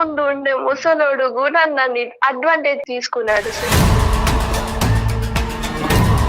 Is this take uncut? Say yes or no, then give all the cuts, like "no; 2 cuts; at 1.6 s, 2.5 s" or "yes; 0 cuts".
no; 1 cut; at 2.8 s